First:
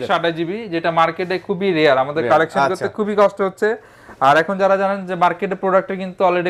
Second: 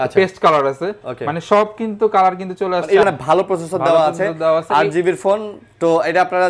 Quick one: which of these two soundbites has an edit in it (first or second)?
second